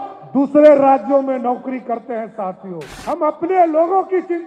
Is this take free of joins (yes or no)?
no